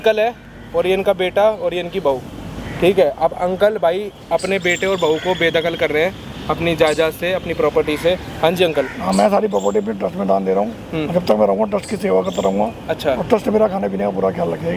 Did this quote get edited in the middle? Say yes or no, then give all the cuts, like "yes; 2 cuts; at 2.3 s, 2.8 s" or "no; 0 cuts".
no; 0 cuts